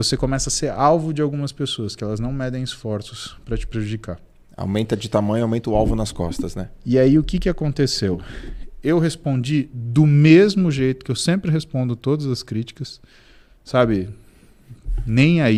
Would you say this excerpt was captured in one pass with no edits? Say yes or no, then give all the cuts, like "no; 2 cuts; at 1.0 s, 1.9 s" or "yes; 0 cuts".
yes; 0 cuts